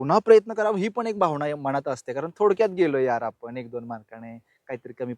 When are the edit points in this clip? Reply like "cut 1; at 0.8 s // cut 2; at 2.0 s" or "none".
none